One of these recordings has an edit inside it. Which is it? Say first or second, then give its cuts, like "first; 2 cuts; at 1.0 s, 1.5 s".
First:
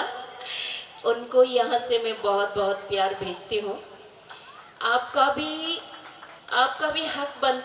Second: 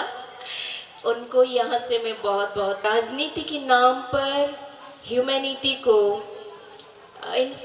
second; 1 cut; at 2.8 s